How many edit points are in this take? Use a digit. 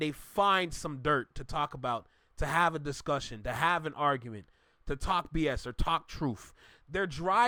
0